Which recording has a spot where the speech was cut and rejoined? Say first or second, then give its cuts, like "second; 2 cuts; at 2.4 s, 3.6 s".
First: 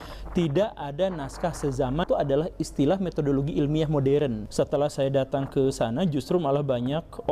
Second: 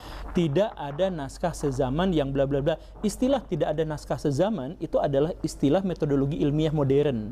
first; 2 cuts; at 2.0 s, 4.4 s